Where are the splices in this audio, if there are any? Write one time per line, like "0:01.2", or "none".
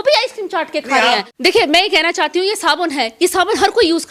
0:01.3